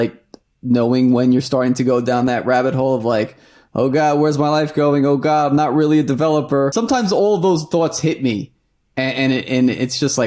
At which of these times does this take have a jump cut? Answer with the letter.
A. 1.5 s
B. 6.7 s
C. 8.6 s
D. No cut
B